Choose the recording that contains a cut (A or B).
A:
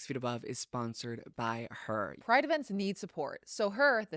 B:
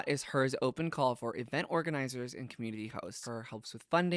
B